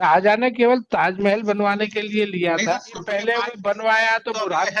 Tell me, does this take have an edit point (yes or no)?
yes